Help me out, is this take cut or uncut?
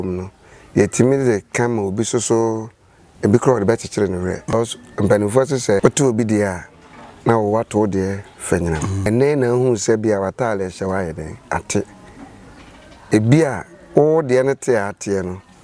cut